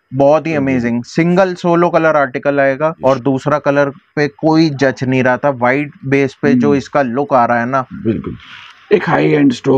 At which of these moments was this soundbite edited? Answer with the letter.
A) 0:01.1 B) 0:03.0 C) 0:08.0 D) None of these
B